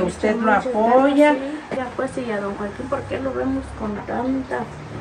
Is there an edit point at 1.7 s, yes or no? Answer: yes